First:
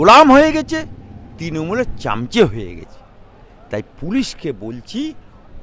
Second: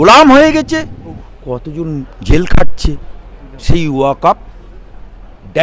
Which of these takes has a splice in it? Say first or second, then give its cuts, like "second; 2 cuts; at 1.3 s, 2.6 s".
second; 1 cut; at 1.3 s